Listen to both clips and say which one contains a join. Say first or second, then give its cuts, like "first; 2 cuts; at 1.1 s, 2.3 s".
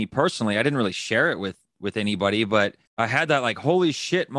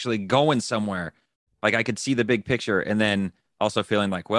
first; 1 cut; at 2.8 s